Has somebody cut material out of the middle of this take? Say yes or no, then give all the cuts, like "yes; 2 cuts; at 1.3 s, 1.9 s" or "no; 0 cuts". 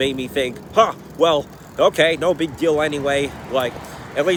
no; 0 cuts